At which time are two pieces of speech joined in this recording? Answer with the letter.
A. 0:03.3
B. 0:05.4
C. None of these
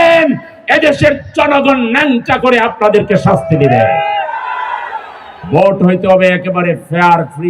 C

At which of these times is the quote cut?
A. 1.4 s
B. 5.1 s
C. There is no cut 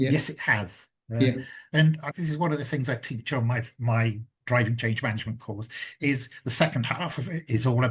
C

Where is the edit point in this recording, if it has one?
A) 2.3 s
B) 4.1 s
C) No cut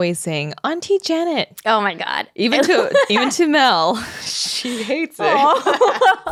C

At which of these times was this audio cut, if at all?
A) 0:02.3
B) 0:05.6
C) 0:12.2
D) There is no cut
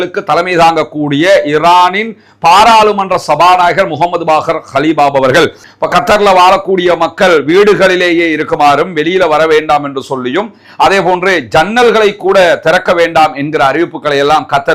B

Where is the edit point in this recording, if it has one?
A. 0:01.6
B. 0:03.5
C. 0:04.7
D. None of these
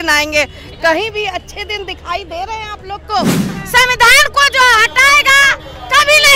B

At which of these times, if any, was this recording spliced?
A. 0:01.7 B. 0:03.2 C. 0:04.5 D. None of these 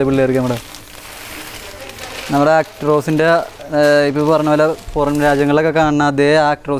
D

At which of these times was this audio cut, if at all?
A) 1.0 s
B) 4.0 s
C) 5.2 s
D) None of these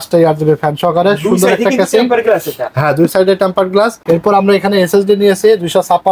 B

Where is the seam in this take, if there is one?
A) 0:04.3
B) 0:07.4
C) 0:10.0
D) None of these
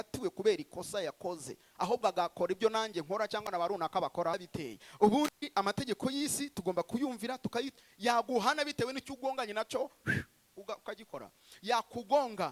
A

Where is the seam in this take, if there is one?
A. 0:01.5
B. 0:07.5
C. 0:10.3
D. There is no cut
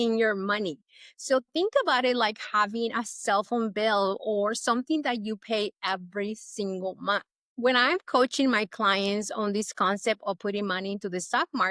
B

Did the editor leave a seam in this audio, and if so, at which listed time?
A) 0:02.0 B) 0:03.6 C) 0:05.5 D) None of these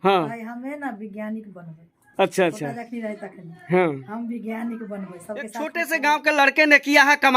C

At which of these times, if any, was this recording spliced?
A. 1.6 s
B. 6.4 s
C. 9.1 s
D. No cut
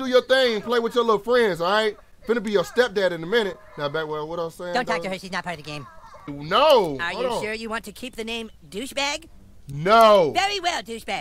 B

